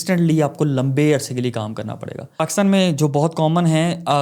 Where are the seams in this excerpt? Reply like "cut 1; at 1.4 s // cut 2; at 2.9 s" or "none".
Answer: cut 1; at 2.4 s